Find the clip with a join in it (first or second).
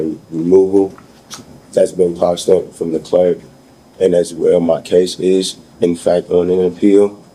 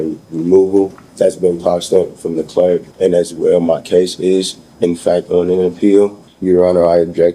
second